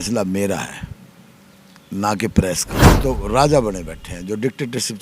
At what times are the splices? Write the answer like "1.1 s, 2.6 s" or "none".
2.8 s